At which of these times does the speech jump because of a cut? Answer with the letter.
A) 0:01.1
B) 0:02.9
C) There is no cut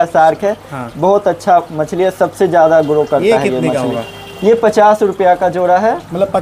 C